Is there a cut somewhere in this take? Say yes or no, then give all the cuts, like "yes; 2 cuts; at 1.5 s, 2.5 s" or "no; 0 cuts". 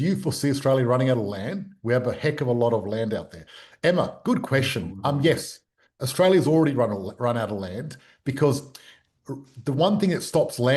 no; 0 cuts